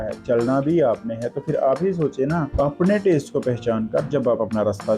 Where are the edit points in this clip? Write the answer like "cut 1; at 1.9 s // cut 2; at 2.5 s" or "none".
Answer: cut 1; at 2.5 s